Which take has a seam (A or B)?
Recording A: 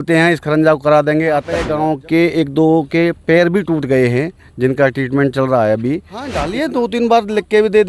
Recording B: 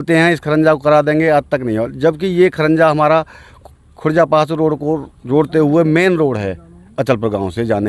A